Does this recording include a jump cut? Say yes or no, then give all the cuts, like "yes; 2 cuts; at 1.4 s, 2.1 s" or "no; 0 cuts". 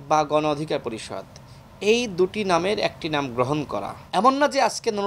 yes; 1 cut; at 4.0 s